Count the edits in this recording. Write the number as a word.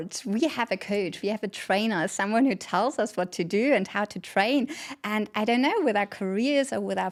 zero